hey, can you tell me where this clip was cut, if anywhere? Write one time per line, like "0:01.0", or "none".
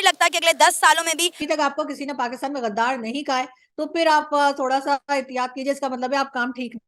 0:01.4